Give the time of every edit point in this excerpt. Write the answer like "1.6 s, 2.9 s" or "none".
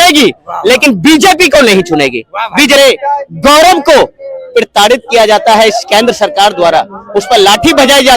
2.8 s